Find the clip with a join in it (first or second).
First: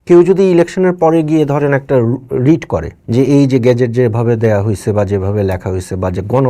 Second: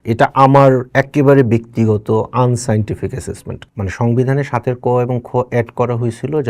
second